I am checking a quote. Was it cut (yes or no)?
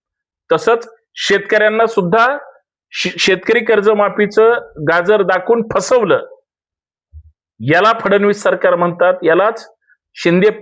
no